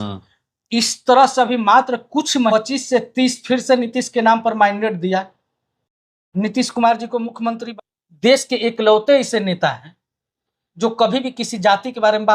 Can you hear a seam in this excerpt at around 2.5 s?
yes; 2 cuts; at 2.5 s, 7.6 s

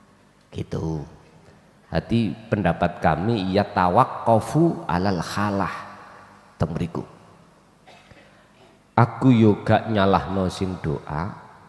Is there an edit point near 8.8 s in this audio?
no; 0 cuts

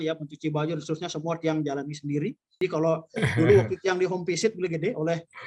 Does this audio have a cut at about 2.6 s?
yes; 1 cut; at 2.6 s

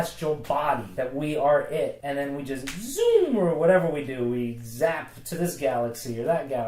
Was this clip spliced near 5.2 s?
no; 2 cuts; at 0.9 s, 2.0 s

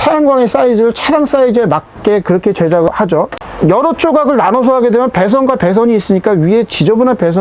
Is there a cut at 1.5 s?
no; 0 cuts

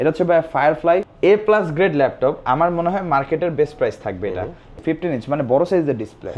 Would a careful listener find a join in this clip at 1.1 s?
yes; 2 cuts; at 1.1 s, 4.7 s

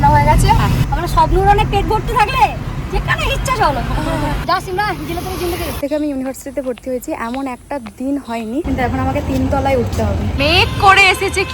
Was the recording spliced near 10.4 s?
yes; 4 cuts; at 4.4 s, 5.8 s, 8.7 s, 10.4 s

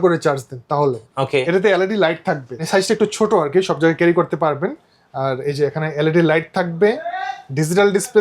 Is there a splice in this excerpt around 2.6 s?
yes; 1 cut; at 2.6 s

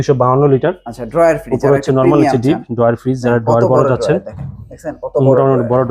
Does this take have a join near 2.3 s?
no; 0 cuts

